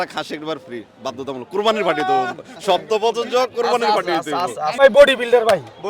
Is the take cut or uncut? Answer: cut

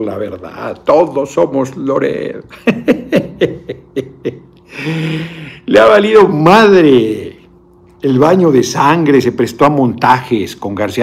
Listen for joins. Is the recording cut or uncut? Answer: cut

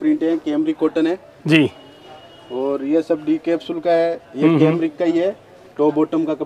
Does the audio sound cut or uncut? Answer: uncut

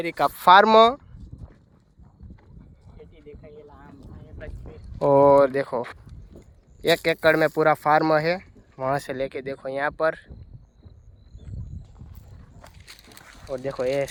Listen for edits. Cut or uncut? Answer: uncut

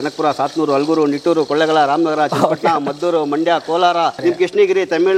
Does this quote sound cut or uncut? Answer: cut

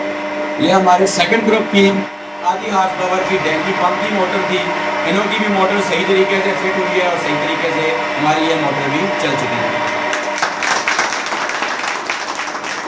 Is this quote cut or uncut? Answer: uncut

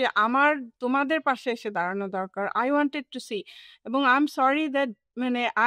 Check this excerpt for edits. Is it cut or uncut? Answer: uncut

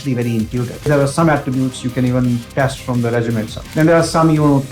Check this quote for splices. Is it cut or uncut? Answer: cut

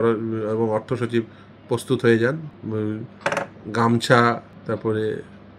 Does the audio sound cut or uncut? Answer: cut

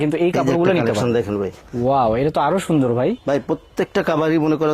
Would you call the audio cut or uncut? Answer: uncut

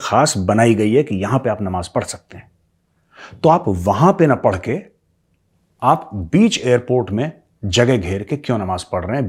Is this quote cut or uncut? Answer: uncut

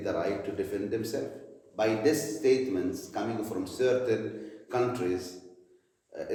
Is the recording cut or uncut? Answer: uncut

